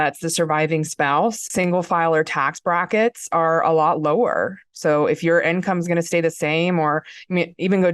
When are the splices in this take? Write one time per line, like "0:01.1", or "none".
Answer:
0:01.4

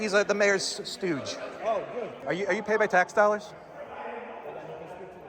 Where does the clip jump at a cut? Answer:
0:02.2

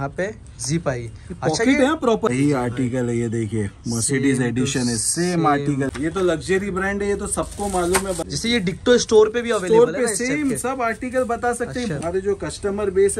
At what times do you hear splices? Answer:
0:02.3
0:05.9
0:08.2
0:12.0

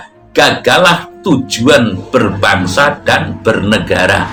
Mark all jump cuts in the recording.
none

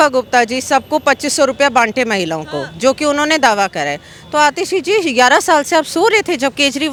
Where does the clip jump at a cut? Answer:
none

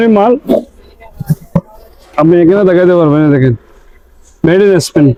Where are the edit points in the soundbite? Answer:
none

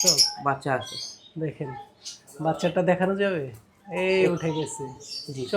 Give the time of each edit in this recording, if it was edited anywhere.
none

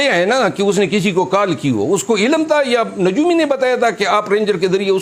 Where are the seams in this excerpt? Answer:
none

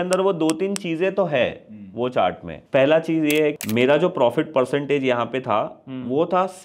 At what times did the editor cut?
0:02.5
0:03.6

